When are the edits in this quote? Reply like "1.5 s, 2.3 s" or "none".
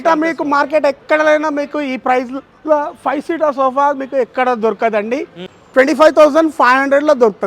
5.5 s